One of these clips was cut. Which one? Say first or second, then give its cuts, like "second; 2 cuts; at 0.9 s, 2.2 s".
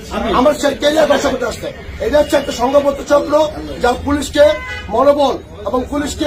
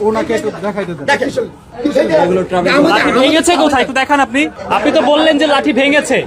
second; 2 cuts; at 1.6 s, 4.6 s